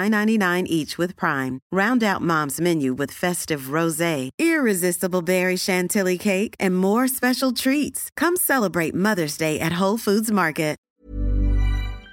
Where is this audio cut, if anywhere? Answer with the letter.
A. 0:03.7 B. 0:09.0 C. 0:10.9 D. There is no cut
C